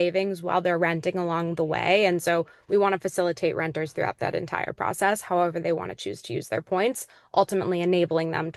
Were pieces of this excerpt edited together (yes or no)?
no